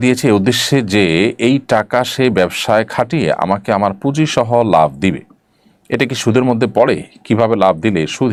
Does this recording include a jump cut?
no; 0 cuts

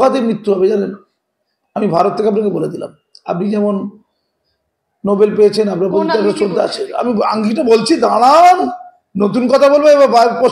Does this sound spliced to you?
no; 0 cuts

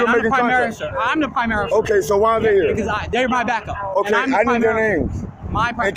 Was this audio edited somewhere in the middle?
no; 0 cuts

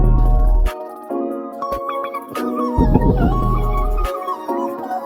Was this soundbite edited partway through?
no; 0 cuts

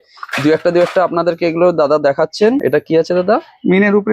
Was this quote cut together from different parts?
yes; 1 cut; at 2.6 s

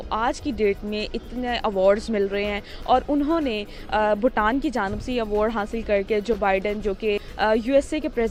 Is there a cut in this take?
no; 0 cuts

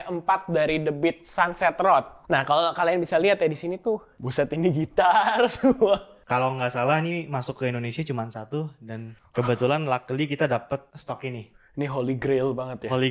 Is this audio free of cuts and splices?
no; 5 cuts; at 2.2 s, 4.1 s, 6.1 s, 9.1 s, 10.9 s

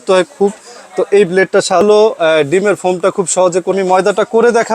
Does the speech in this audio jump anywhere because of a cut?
yes; 2 cuts; at 1.8 s, 3.8 s

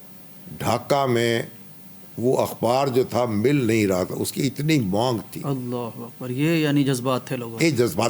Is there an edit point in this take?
no; 0 cuts

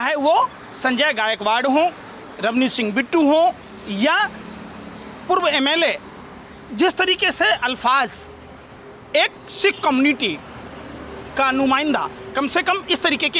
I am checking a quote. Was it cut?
no; 0 cuts

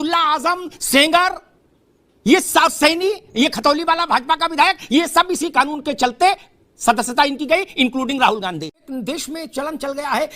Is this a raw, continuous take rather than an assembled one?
no; 1 cut; at 8.7 s

